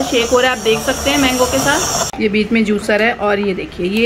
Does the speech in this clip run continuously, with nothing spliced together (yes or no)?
no